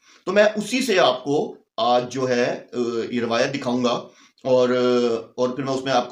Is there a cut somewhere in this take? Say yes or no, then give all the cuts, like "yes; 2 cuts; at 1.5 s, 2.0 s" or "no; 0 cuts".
no; 0 cuts